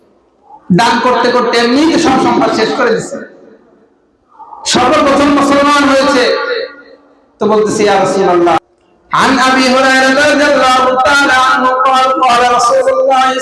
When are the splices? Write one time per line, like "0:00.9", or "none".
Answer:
0:08.6